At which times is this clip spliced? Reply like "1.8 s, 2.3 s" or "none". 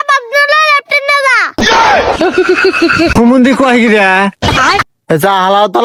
none